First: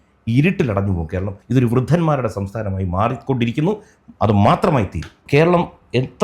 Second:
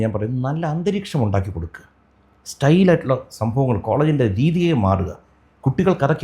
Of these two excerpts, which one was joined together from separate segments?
first; 2 cuts; at 1.4 s, 5.2 s

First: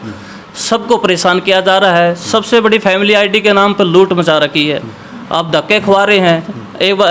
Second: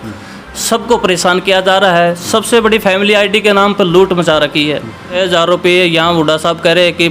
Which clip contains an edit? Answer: second; 1 cut; at 5.2 s

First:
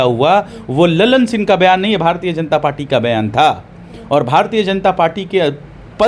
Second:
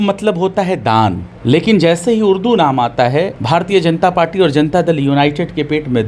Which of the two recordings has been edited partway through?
second; 2 cuts; at 1.3 s, 3.4 s

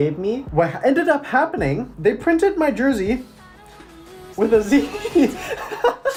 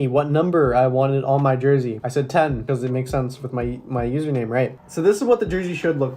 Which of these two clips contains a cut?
second; 1 cut; at 4.7 s

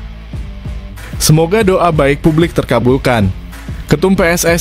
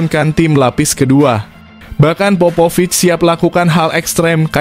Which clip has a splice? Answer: first; 1 cut; at 1.2 s

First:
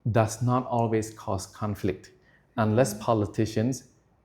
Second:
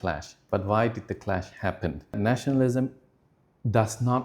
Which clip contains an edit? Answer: second; 1 cut; at 2.2 s

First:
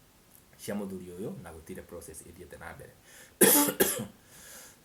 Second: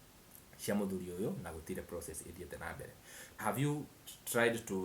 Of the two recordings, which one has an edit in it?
second; 1 cut; at 3.2 s

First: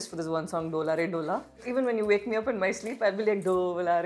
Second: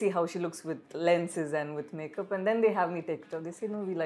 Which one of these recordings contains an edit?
first; 1 cut; at 1.7 s

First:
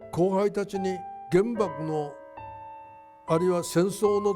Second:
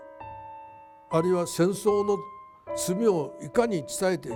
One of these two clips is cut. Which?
first; 1 cut; at 1.1 s

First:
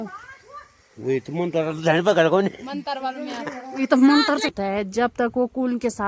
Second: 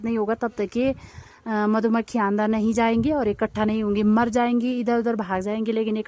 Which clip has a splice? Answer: first; 1 cut; at 4.5 s

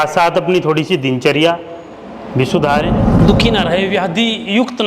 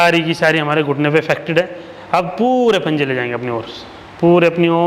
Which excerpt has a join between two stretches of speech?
first; 1 cut; at 3.1 s

